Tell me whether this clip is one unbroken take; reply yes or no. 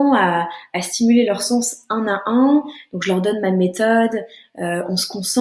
yes